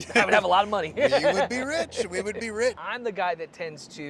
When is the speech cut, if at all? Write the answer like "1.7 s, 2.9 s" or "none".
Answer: 2.9 s